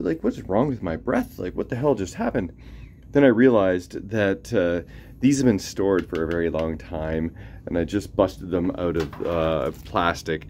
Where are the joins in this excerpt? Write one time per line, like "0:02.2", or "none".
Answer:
none